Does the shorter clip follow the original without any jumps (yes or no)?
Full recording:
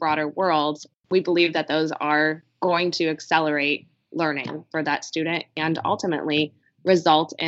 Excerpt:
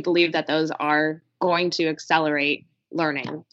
yes